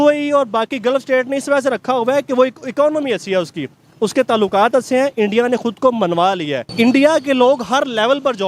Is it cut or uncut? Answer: cut